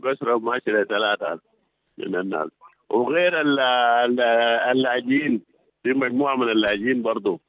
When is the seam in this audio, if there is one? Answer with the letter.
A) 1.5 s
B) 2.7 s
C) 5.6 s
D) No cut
D